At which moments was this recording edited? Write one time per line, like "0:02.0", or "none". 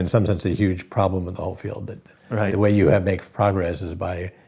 none